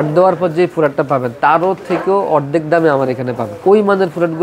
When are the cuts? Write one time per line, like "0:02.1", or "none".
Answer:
0:03.5